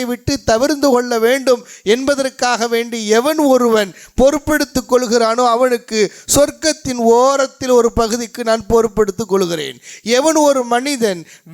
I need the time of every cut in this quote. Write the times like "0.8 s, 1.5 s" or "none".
none